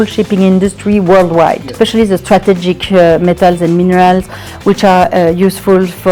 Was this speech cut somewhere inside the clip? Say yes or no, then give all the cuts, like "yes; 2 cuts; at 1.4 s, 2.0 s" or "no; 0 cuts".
yes; 1 cut; at 1.7 s